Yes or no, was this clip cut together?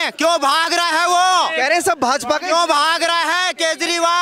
no